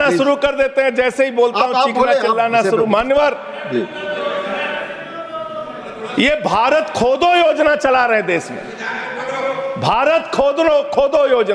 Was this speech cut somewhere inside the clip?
no; 0 cuts

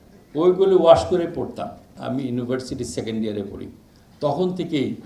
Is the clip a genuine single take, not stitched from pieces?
no; 1 cut; at 2.0 s

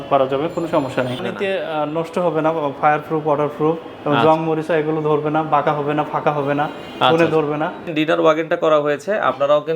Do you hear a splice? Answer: yes; 2 cuts; at 1.2 s, 7.9 s

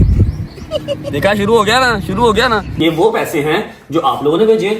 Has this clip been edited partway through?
yes; 2 cuts; at 1.0 s, 2.7 s

